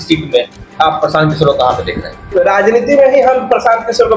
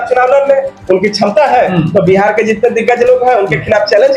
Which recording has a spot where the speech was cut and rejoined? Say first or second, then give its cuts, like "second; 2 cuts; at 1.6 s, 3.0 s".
first; 1 cut; at 2.3 s